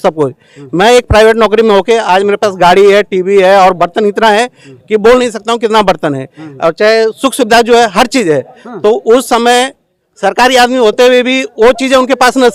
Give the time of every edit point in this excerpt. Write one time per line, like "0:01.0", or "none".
none